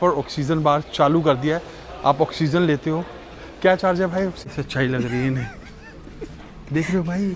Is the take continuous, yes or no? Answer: no